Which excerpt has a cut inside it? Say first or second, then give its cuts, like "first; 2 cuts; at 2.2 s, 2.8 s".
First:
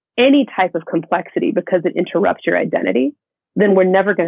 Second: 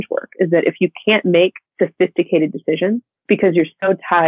second; 2 cuts; at 1.6 s, 3.1 s